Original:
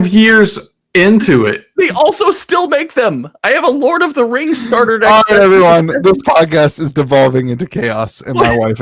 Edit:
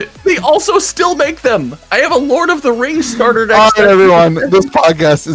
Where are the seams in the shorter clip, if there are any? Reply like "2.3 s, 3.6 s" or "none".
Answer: none